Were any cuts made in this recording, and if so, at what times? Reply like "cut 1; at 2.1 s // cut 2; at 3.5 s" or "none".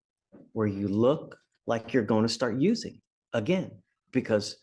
none